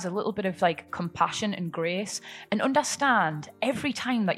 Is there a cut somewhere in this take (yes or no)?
no